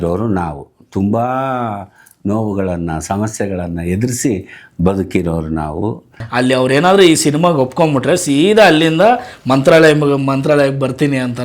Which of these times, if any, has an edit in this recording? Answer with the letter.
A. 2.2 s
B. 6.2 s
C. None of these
B